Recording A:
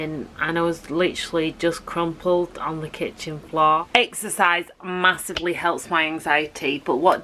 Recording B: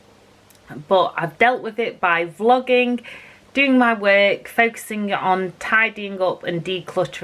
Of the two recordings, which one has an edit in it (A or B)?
A